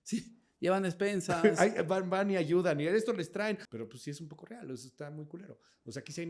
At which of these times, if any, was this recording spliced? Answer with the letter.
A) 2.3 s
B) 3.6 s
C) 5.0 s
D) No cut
B